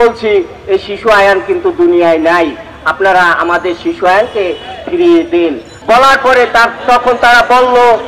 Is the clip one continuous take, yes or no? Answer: no